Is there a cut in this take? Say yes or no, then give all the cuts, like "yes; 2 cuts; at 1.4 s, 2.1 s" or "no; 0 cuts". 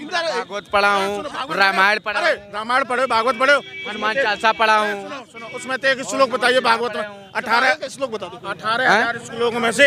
no; 0 cuts